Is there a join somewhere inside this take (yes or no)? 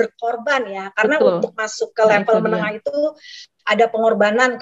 no